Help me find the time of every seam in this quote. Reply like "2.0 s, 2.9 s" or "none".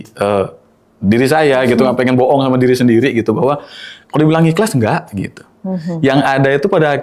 none